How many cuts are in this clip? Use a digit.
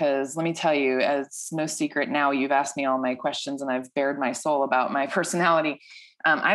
0